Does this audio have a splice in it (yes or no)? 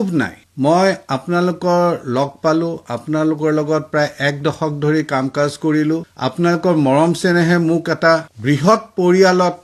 no